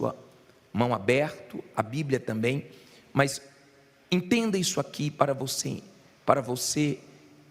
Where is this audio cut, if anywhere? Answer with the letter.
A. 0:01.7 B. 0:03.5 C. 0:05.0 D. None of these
B